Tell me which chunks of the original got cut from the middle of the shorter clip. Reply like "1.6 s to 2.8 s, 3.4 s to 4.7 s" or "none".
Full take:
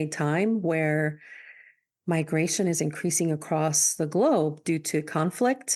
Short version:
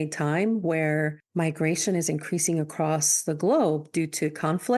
1.2 s to 1.9 s